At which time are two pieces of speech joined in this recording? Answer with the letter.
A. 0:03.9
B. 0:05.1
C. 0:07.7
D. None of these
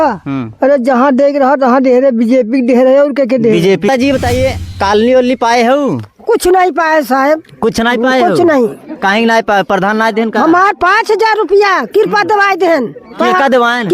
A